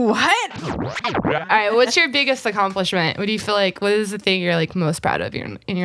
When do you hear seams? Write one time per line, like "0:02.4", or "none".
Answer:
0:01.1